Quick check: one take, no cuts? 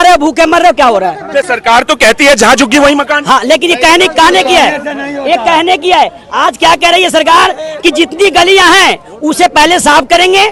yes; 0 cuts

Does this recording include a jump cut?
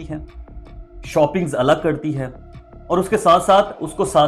no; 0 cuts

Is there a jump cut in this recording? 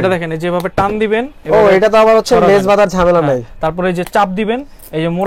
no; 0 cuts

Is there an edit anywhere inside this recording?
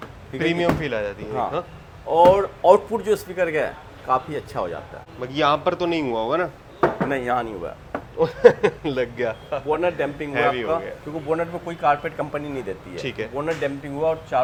no; 0 cuts

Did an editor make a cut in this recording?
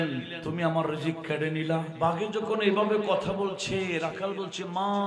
yes; 1 cut; at 1.9 s

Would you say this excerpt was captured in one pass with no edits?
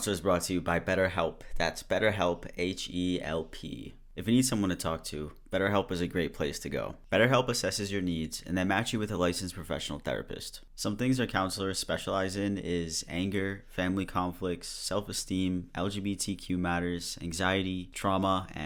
yes; 0 cuts

